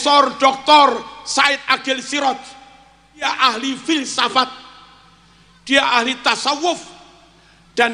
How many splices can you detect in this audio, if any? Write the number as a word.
one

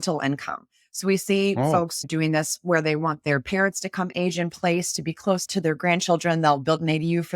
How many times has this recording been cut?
one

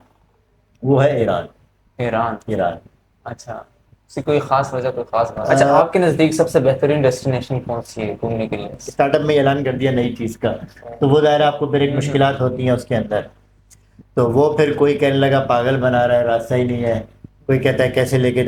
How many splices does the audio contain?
two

